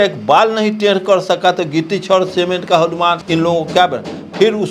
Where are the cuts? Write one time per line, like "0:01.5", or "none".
0:03.2